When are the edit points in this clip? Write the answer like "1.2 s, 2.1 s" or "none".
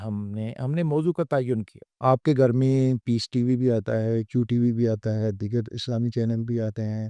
1.8 s